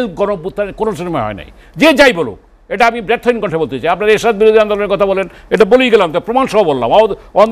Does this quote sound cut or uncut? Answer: uncut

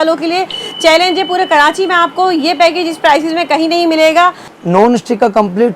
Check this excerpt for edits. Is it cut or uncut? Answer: cut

